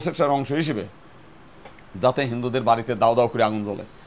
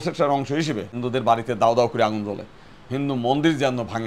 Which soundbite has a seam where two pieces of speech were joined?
second; 1 cut; at 0.9 s

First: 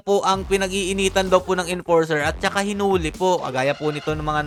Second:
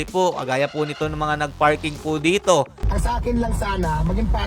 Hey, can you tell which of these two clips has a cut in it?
second; 1 cut; at 2.8 s

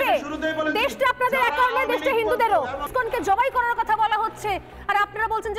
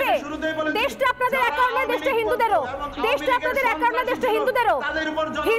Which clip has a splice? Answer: first; 1 cut; at 2.9 s

